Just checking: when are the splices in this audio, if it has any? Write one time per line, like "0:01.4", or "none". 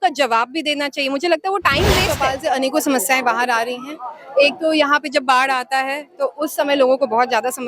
0:02.1